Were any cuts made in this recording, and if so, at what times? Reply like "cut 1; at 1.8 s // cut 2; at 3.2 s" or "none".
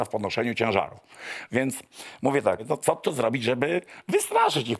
cut 1; at 2.6 s